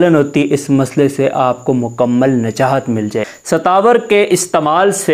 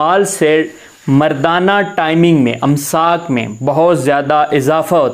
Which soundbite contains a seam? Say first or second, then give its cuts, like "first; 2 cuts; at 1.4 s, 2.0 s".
first; 1 cut; at 3.3 s